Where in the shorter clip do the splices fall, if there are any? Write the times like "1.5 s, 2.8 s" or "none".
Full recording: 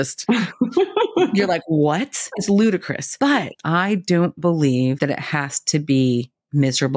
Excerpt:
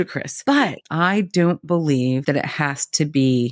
none